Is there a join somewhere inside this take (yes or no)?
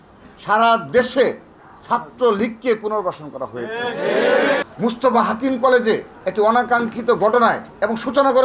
yes